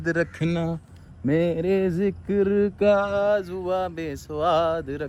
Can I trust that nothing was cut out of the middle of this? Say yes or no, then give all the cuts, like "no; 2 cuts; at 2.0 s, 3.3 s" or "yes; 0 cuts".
yes; 0 cuts